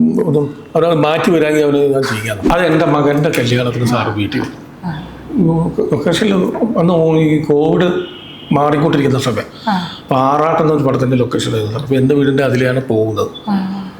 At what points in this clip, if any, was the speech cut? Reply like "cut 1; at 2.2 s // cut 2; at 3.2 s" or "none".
cut 1; at 2.5 s